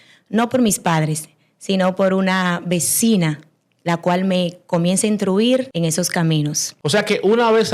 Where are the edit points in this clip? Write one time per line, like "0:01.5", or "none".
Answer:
0:05.7
0:06.7